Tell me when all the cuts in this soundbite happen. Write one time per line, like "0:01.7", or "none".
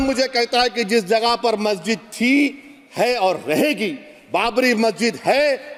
none